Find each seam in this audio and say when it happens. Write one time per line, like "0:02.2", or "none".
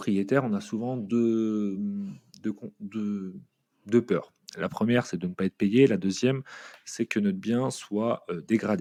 none